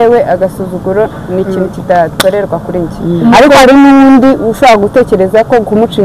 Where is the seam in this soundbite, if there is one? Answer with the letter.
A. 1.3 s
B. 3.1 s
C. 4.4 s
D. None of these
D